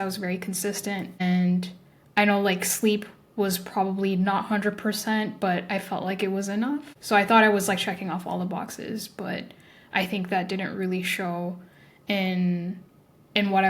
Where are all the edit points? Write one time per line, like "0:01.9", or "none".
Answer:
0:01.2
0:06.9